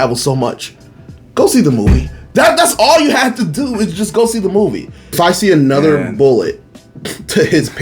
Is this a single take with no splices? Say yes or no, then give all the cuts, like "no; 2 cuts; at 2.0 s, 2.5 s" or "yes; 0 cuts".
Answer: no; 1 cut; at 5.1 s